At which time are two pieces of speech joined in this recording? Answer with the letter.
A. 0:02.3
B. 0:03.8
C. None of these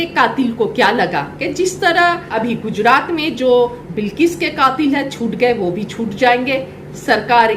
A